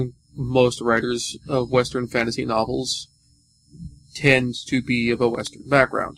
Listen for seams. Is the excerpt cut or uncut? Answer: uncut